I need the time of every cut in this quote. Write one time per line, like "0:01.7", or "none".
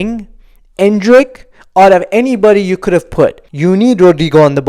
0:03.5